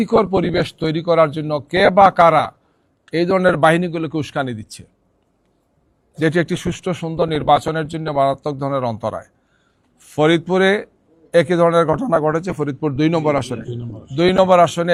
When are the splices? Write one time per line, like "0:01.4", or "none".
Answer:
none

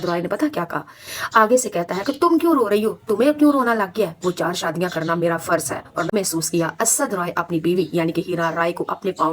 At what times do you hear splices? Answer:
0:06.1

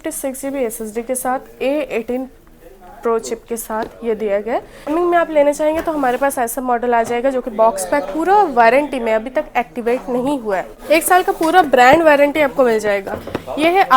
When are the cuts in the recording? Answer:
0:04.9
0:10.7

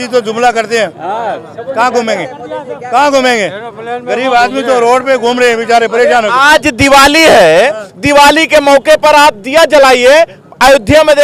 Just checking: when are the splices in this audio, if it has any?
none

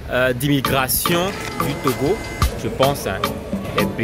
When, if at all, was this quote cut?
0:02.4

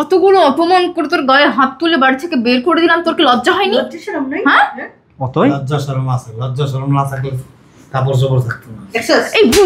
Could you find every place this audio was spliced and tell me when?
none

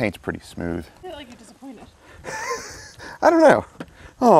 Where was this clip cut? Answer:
0:01.0

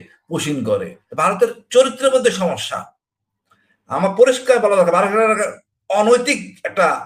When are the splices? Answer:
0:01.0

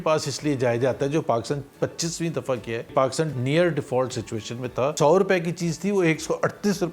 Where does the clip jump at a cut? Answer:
0:03.1
0:04.9

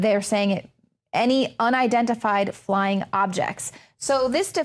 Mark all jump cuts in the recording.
0:01.1

